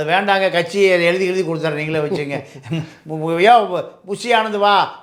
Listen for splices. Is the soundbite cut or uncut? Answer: uncut